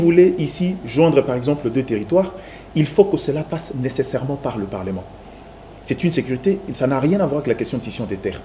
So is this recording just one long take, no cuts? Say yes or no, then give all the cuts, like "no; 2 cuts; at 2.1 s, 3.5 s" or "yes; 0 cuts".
yes; 0 cuts